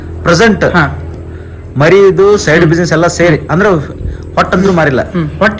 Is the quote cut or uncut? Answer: uncut